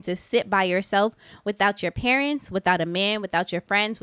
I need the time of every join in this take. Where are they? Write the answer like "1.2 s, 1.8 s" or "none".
none